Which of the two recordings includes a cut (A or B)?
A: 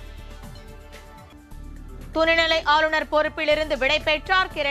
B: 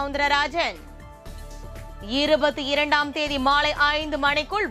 A